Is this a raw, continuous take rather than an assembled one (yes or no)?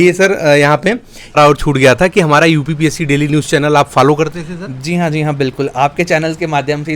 no